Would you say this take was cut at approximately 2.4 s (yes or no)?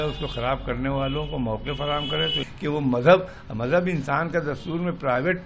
yes